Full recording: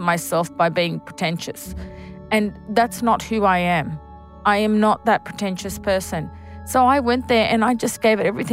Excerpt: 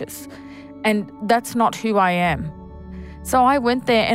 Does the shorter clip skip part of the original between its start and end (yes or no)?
yes